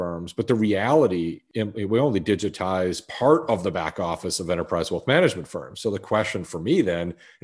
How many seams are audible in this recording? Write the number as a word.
one